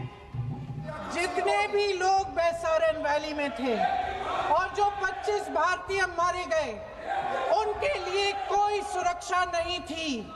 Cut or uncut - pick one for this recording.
cut